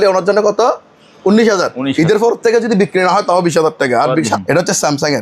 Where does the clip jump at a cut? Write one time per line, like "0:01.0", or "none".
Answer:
0:04.3